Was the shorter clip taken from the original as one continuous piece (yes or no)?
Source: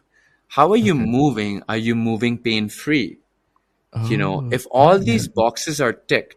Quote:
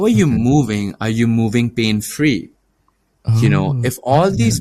yes